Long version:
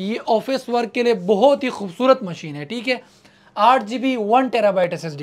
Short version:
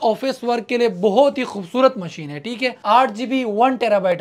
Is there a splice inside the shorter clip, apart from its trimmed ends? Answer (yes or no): yes